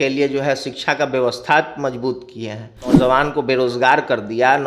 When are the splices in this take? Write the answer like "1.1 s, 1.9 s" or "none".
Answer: 2.9 s